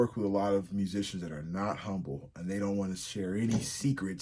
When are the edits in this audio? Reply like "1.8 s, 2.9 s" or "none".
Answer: none